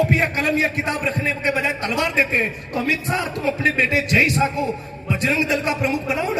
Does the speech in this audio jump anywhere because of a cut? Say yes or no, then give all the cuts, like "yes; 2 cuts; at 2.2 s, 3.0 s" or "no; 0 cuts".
no; 0 cuts